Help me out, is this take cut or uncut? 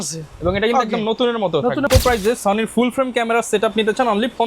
cut